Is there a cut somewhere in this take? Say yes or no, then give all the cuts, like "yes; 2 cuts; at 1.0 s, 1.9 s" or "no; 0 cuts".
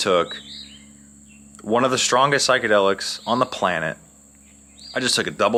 no; 0 cuts